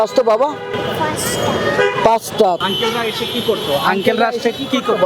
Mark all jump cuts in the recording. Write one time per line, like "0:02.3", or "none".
0:00.7
0:02.6